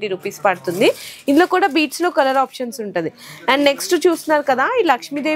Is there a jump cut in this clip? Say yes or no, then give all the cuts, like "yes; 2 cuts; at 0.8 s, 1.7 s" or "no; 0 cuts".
no; 0 cuts